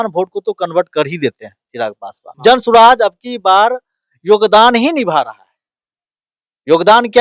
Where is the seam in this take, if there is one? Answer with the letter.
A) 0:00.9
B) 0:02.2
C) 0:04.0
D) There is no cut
B